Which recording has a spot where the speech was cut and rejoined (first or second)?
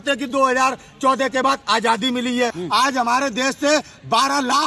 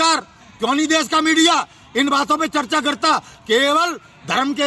first